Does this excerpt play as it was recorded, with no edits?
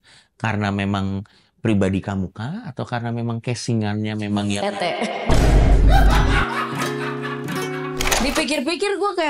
no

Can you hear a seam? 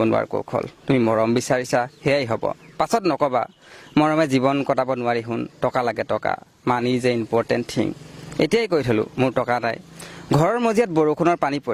no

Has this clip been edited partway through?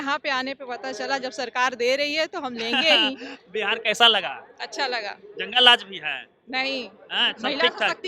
no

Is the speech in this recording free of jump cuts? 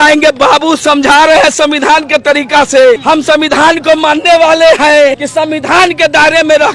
no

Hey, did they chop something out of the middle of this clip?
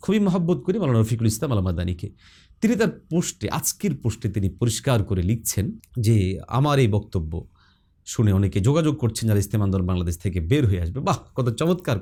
no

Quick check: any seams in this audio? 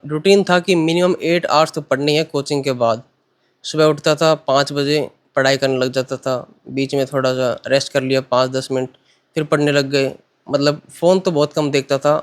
no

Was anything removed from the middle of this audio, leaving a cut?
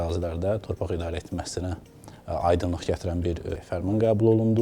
yes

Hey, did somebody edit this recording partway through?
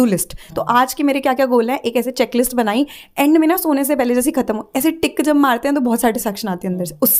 no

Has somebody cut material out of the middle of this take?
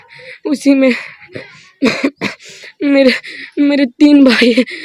no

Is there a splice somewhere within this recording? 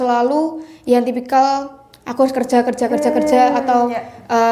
no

